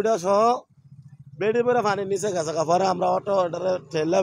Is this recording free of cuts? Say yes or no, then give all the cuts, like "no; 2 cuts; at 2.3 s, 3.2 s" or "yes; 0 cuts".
yes; 0 cuts